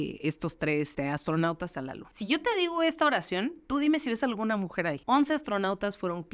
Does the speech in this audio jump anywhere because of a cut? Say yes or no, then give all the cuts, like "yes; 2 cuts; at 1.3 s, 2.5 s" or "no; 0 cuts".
yes; 1 cut; at 0.9 s